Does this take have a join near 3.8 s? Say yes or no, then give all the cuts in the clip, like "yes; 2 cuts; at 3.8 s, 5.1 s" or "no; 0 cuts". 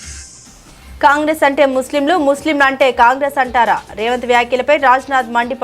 no; 1 cut; at 1.0 s